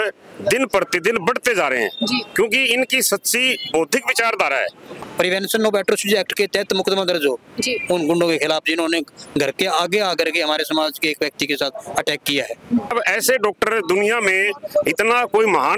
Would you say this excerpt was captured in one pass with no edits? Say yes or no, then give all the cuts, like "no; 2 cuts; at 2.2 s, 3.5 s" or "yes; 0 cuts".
no; 2 cuts; at 5.0 s, 12.9 s